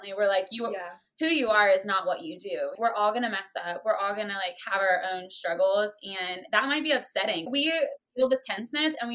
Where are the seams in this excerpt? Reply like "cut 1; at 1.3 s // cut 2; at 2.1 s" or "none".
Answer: cut 1; at 2.7 s // cut 2; at 7.5 s